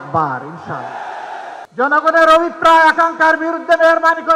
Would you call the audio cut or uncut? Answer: cut